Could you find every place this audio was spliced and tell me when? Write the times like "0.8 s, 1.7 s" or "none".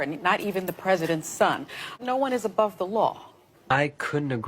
3.3 s